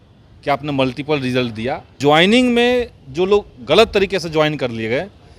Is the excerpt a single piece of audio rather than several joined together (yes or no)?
no